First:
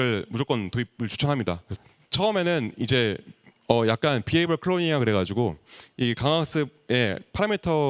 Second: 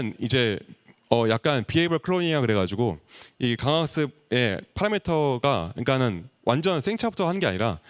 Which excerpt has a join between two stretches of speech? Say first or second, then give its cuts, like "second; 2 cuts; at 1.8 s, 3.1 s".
first; 1 cut; at 1.7 s